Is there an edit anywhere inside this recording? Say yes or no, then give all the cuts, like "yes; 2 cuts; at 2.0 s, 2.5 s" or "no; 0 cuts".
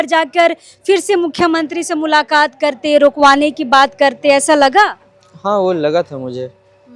no; 0 cuts